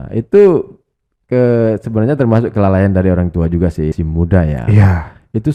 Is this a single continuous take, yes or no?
no